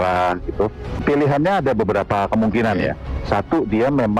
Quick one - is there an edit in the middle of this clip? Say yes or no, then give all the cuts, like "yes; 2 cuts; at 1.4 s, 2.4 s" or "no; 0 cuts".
yes; 1 cut; at 1.0 s